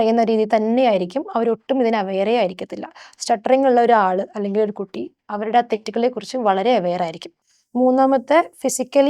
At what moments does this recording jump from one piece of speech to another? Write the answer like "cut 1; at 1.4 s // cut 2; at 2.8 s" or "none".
cut 1; at 7.3 s